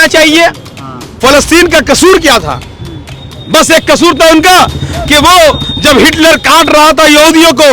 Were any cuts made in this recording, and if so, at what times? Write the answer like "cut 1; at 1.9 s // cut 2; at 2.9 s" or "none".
cut 1; at 1.1 s